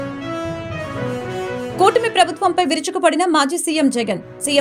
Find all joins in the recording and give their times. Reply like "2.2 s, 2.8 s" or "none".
1.7 s